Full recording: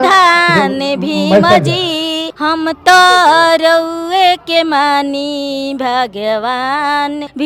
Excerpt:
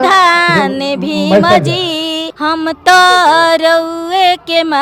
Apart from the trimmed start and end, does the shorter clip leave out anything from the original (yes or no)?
no